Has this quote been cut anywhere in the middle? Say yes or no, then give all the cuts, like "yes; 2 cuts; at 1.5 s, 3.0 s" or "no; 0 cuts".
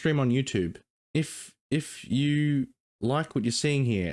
yes; 1 cut; at 0.9 s